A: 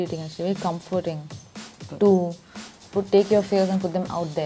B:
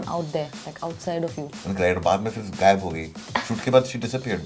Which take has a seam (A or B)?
B